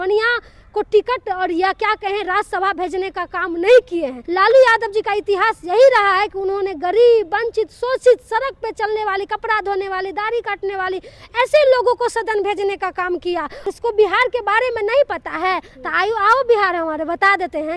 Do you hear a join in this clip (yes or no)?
yes